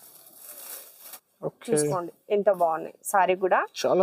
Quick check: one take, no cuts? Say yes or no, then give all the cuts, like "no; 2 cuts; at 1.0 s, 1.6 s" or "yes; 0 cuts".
no; 1 cut; at 1.0 s